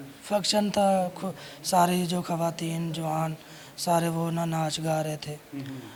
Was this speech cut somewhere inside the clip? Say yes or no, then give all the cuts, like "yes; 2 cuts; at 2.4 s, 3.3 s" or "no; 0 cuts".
no; 0 cuts